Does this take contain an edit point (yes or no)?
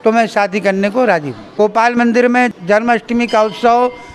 yes